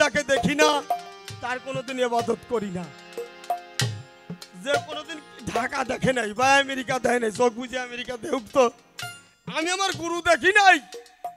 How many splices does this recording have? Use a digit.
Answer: 0